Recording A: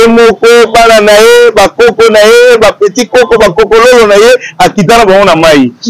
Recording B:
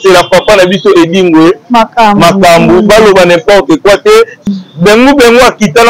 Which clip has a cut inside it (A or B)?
B